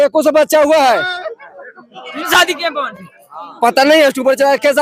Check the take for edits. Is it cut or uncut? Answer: uncut